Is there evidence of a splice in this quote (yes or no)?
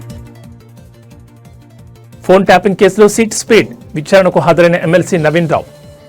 no